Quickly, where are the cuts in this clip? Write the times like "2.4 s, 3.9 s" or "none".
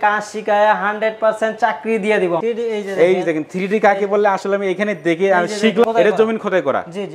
2.4 s, 5.8 s